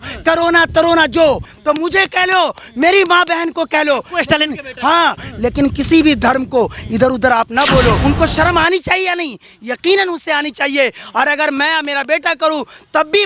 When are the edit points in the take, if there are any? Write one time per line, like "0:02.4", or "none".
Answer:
0:01.5
0:05.2
0:08.0

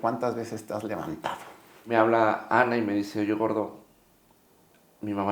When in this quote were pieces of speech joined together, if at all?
0:01.9

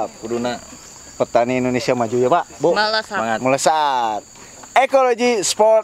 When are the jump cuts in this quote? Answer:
none

